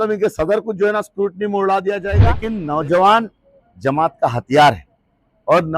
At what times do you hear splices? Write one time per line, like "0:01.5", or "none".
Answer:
0:02.4